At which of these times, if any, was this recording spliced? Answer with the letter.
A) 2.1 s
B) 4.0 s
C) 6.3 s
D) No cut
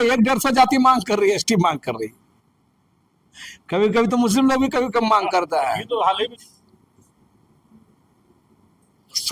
C